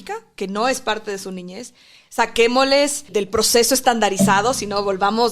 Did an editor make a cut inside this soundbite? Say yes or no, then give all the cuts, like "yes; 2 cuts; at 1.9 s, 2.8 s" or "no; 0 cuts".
yes; 1 cut; at 3.1 s